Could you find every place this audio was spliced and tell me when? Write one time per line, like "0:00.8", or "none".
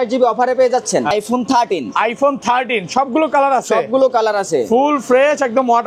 0:01.1